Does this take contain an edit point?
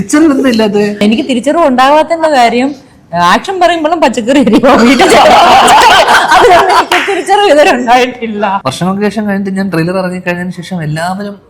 yes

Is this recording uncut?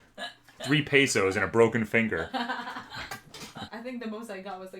no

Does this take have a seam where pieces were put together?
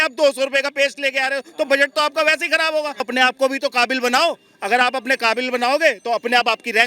yes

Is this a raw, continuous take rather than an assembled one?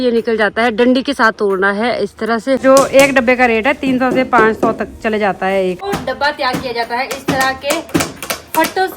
no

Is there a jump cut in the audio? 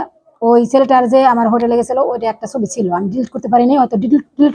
no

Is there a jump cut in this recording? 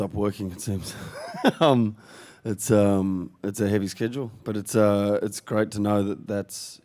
yes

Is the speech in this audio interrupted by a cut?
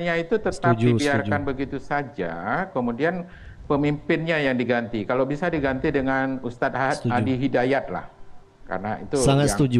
no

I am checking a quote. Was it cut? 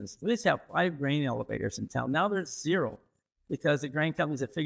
no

